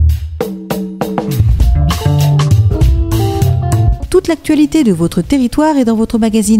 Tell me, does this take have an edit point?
no; 0 cuts

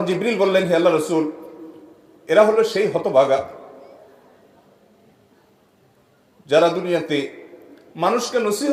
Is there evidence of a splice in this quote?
no; 0 cuts

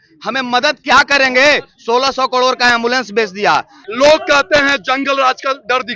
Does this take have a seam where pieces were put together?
yes; 1 cut; at 3.8 s

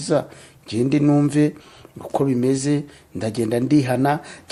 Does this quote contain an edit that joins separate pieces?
no; 0 cuts

